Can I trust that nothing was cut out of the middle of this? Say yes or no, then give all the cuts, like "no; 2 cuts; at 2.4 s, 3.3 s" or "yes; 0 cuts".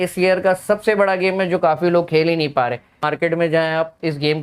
no; 1 cut; at 3.0 s